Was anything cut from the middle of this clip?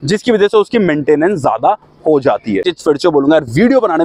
yes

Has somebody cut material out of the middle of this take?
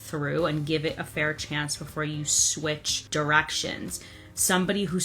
yes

